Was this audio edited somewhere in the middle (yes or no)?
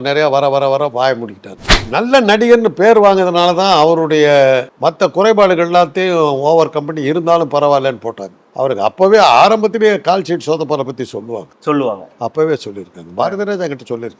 yes